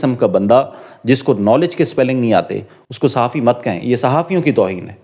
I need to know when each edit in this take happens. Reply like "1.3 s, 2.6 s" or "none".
none